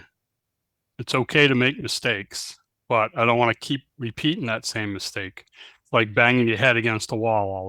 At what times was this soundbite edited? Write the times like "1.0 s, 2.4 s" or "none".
none